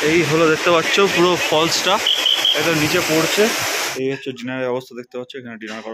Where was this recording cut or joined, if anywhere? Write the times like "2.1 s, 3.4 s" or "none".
3.9 s